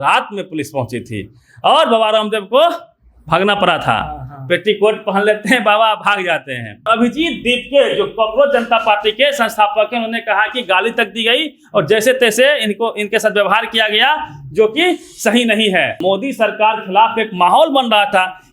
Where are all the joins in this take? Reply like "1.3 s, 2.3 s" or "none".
6.9 s, 16.0 s